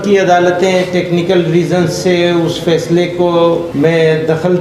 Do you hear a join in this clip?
yes; 1 cut; at 3.7 s

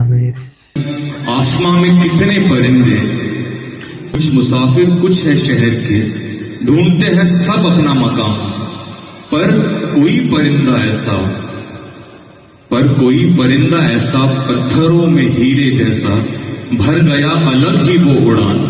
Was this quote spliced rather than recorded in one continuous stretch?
yes; 2 cuts; at 0.8 s, 4.2 s

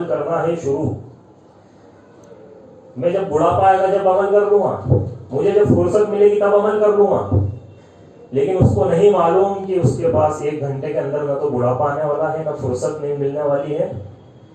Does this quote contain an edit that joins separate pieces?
no; 0 cuts

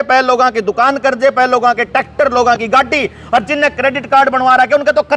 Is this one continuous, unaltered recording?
yes; 0 cuts

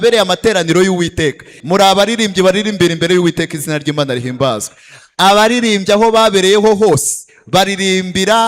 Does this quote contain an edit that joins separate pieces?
yes; 1 cut; at 1.5 s

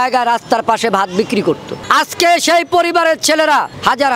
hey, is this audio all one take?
yes; 0 cuts

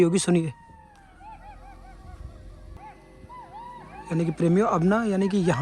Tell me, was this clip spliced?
yes; 1 cut; at 2.8 s

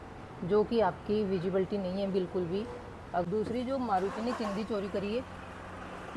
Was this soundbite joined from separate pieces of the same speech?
yes; 1 cut; at 3.2 s

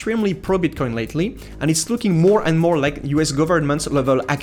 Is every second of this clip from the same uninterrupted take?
yes; 0 cuts

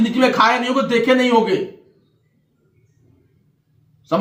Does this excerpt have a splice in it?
no; 0 cuts

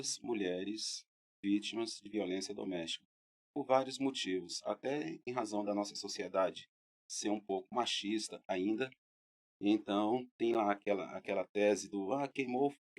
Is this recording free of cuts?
yes; 0 cuts

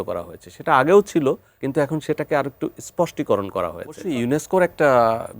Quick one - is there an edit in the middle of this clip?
yes; 2 cuts; at 1.5 s, 4.1 s

